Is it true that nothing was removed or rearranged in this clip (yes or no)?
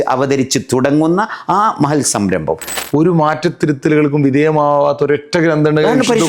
no